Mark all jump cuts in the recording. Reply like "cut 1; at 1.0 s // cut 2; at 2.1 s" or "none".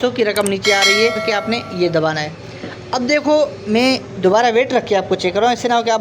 cut 1; at 1.2 s